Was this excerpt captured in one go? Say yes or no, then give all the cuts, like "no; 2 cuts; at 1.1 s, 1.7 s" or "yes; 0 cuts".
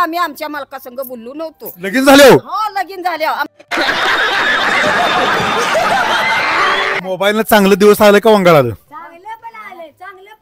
no; 3 cuts; at 1.9 s, 3.5 s, 7.0 s